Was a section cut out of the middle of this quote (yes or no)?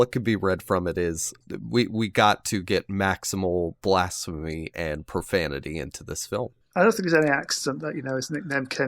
yes